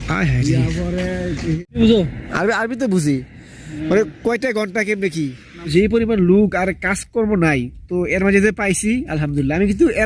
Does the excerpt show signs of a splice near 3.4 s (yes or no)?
no